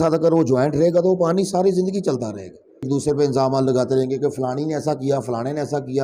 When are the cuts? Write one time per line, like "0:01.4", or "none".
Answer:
0:02.9